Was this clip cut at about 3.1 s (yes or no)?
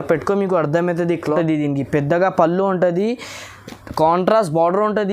no